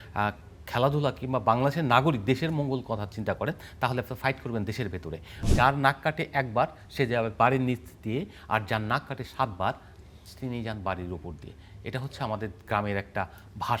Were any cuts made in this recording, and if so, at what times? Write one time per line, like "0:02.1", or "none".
0:05.5